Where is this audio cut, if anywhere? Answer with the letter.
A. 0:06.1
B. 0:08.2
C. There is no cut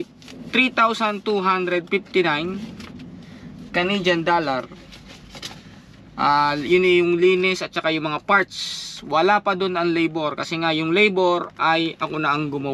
C